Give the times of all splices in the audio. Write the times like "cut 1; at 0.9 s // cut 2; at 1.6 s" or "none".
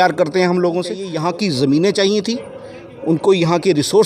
cut 1; at 1.1 s